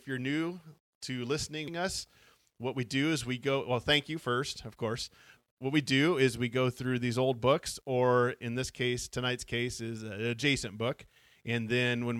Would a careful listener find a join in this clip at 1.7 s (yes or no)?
yes